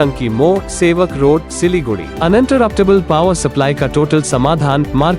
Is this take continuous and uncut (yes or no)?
yes